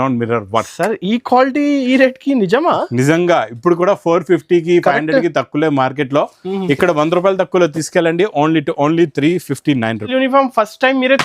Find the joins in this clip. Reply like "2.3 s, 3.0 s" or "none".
10.1 s